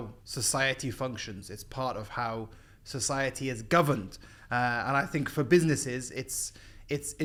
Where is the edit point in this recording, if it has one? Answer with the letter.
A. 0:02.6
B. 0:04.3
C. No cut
C